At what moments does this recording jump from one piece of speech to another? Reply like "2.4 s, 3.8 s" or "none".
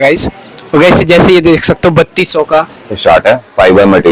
2.9 s